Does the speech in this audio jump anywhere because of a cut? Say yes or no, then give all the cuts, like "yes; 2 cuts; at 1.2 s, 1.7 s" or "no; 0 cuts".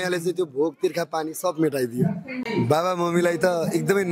yes; 1 cut; at 2.5 s